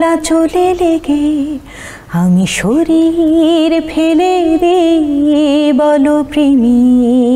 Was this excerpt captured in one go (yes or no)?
yes